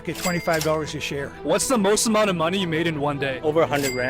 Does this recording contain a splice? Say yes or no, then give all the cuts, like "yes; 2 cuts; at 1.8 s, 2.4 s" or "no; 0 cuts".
yes; 1 cut; at 1.4 s